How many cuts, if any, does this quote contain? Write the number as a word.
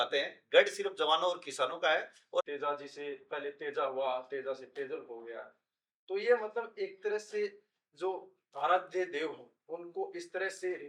one